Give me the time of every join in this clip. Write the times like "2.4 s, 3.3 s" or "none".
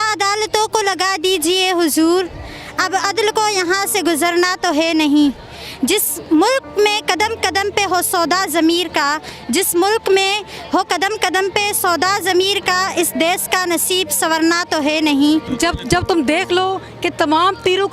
15.5 s